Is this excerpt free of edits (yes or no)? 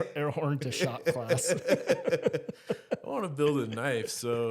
yes